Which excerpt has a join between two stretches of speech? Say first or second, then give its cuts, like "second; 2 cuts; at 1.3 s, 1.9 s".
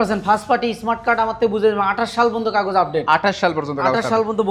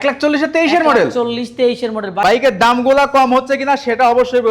second; 1 cut; at 2.2 s